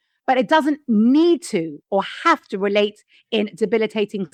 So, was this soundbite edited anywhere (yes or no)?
no